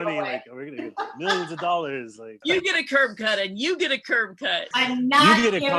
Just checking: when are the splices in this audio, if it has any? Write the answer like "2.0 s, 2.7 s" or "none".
2.4 s, 4.6 s